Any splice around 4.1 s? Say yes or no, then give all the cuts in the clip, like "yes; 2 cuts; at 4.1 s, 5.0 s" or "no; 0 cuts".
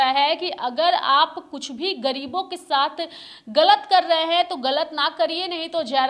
no; 0 cuts